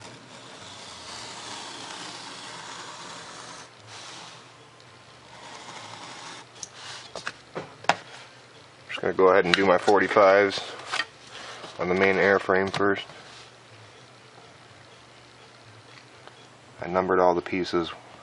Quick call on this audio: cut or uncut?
uncut